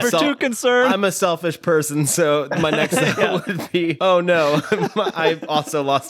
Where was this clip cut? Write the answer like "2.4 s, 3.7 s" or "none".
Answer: 4.0 s